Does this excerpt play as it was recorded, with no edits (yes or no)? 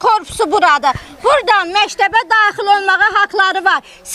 yes